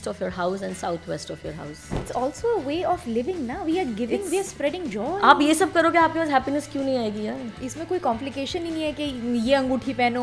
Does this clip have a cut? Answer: yes; 2 cuts; at 2.1 s, 7.6 s

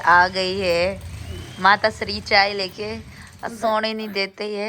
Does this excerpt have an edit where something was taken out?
no; 0 cuts

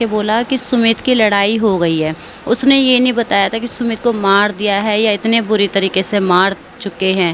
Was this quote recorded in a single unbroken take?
yes; 0 cuts

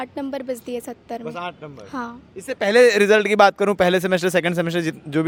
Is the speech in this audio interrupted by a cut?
no; 0 cuts

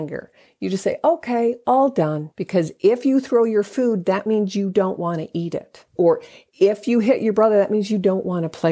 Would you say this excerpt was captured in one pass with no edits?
no; 2 cuts; at 2.3 s, 5.9 s

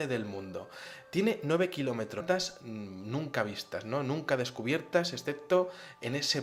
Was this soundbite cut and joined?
no; 0 cuts

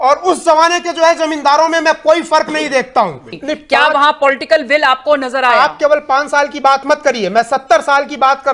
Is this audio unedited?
no; 1 cut; at 3.3 s

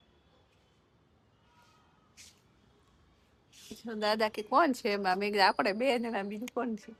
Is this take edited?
no; 0 cuts

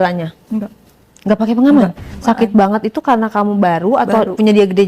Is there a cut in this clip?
yes; 1 cut; at 2.1 s

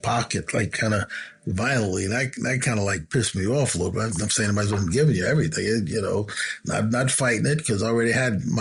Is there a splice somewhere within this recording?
no; 0 cuts

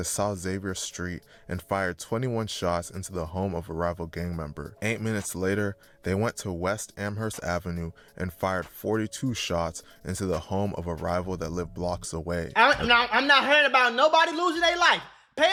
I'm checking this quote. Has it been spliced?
no; 0 cuts

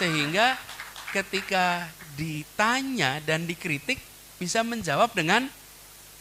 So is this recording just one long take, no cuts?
yes; 0 cuts

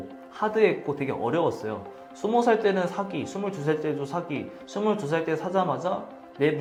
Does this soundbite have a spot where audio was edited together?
no; 0 cuts

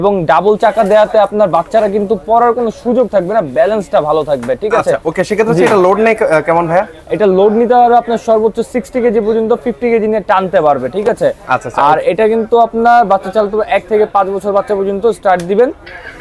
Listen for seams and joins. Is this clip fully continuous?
yes; 0 cuts

